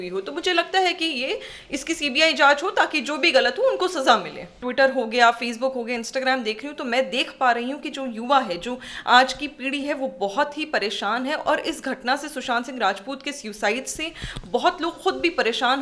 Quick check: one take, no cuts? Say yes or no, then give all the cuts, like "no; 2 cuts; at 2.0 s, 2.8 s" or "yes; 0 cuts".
no; 1 cut; at 4.7 s